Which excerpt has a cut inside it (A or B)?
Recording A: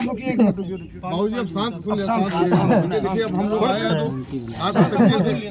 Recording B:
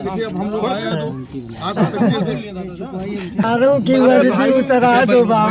B